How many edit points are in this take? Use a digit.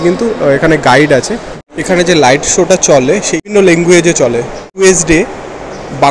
3